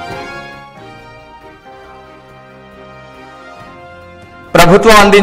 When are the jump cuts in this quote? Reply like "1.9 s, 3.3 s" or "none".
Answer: 3.0 s